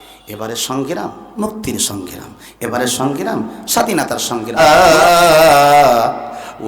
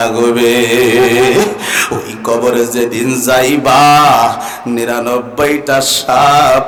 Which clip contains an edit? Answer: first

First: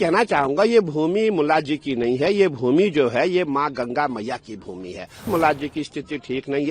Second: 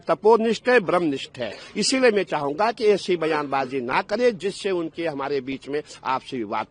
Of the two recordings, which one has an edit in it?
first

